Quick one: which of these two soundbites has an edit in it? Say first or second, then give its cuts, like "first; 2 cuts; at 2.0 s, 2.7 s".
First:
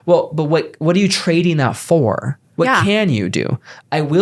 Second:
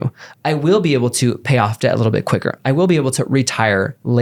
first; 1 cut; at 2.4 s